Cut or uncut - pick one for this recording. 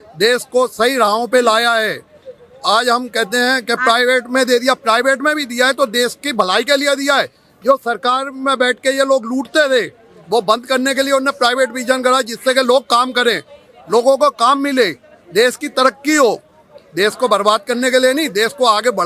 uncut